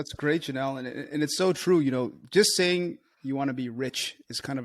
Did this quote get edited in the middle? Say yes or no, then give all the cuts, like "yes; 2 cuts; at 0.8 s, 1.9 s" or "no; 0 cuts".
no; 0 cuts